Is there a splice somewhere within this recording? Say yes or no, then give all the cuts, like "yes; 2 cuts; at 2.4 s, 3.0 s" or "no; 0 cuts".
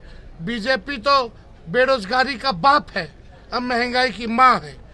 no; 0 cuts